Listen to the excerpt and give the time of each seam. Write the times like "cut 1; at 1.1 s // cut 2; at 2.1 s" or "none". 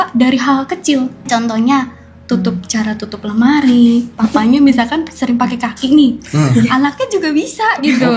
cut 1; at 1.3 s